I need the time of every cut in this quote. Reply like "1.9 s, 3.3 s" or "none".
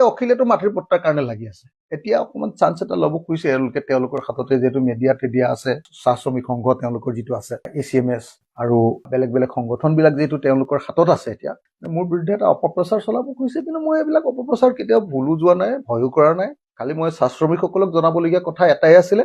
none